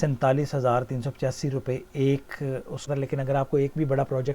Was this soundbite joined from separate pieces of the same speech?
yes; 1 cut; at 2.9 s

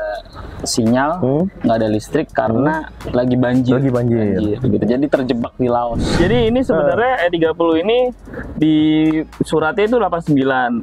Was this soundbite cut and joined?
yes; 1 cut; at 6.2 s

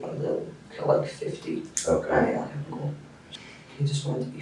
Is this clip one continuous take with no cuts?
no; 1 cut; at 3.2 s

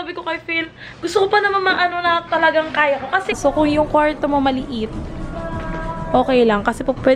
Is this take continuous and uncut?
no; 1 cut; at 3.4 s

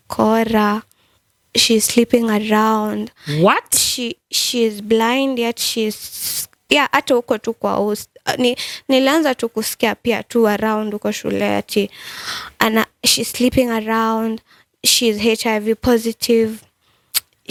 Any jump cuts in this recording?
no; 0 cuts

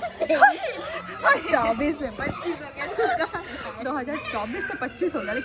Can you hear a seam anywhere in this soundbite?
no; 0 cuts

